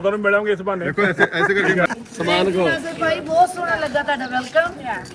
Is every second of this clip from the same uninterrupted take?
no; 1 cut; at 2.0 s

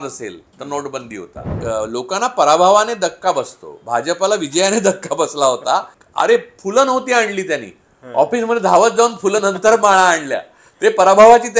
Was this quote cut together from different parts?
yes; 2 cuts; at 1.5 s, 6.0 s

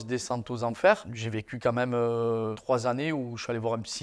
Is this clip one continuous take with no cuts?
yes; 0 cuts

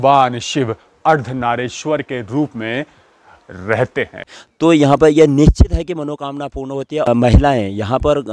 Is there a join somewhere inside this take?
yes; 2 cuts; at 4.2 s, 7.1 s

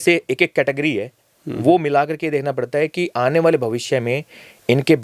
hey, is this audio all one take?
yes; 0 cuts

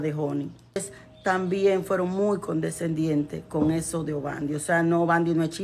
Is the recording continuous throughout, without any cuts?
no; 1 cut; at 1.0 s

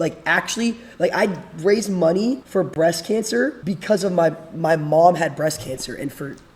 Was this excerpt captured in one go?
no; 2 cuts; at 2.4 s, 3.6 s

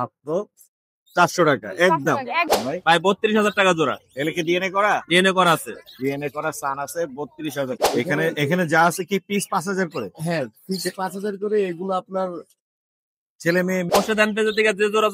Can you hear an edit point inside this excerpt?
yes; 3 cuts; at 2.5 s, 7.8 s, 13.9 s

